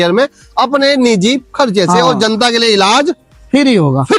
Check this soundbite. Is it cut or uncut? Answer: uncut